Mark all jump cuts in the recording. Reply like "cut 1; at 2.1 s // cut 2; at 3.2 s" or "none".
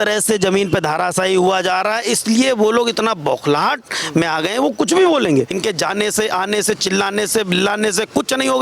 cut 1; at 5.5 s